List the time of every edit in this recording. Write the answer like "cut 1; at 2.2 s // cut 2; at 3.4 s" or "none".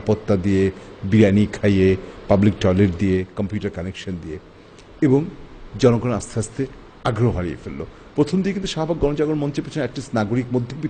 none